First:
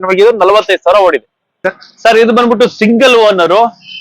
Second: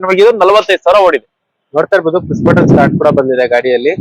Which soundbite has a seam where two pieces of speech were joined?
first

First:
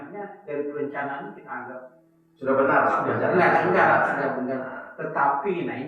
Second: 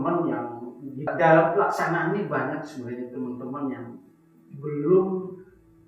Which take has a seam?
second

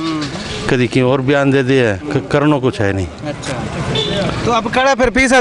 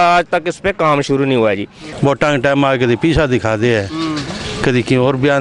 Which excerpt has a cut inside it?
second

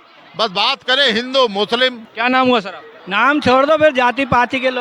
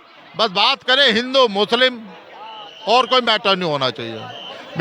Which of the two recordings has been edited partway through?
first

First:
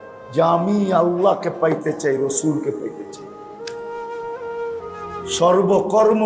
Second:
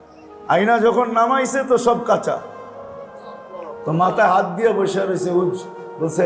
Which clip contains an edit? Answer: first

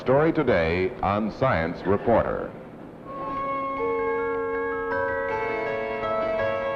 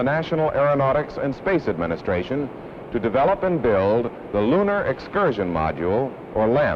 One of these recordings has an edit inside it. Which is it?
second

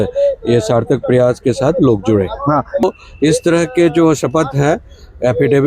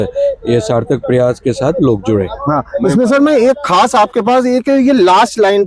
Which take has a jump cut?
first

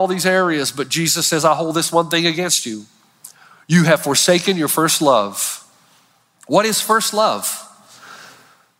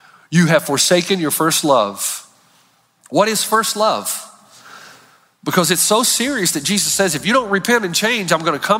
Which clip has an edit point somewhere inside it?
first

